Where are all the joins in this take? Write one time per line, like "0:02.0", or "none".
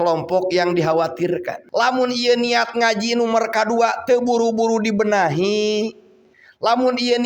0:01.6